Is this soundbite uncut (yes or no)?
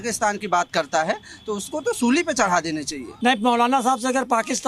no